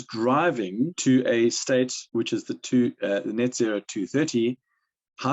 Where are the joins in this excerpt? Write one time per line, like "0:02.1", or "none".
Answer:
0:01.0
0:02.0

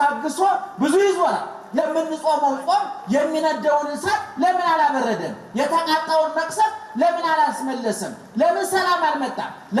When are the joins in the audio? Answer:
0:01.8

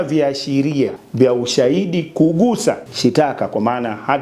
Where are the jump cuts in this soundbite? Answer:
0:01.0
0:02.9

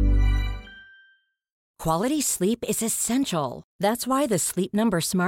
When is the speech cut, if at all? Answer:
0:01.7

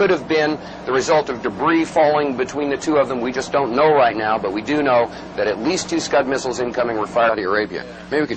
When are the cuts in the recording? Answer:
none

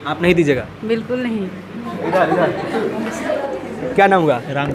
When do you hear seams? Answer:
none

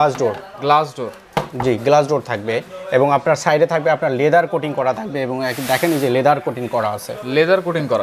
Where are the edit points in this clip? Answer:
none

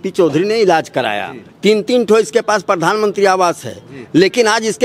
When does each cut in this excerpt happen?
none

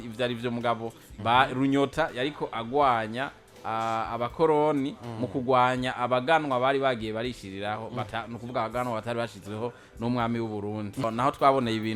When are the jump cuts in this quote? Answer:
0:11.0

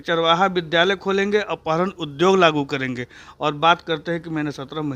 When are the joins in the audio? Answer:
none

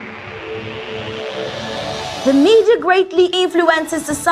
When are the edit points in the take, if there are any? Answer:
0:01.5

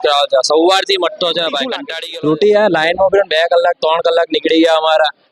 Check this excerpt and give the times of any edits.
none

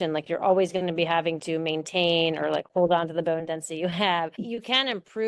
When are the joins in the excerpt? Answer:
0:04.4

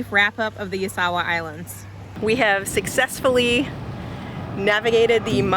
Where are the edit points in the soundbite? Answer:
0:02.1

